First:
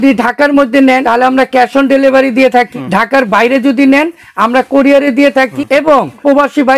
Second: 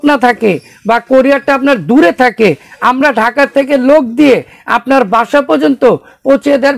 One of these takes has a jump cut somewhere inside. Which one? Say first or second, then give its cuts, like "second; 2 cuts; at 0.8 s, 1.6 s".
first; 3 cuts; at 1.0 s, 2.7 s, 6.1 s